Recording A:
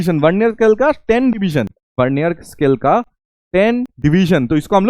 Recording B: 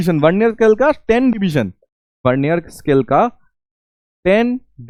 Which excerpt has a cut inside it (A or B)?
A